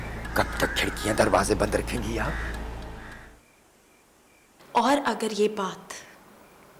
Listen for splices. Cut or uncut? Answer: cut